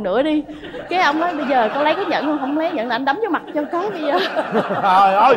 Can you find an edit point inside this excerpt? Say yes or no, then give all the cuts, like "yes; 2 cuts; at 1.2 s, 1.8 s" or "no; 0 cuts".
no; 0 cuts